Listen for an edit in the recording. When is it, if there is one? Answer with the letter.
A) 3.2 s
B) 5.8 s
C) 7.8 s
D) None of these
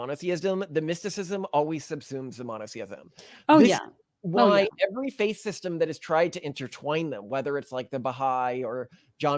D